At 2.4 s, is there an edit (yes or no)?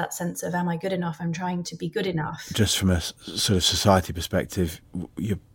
yes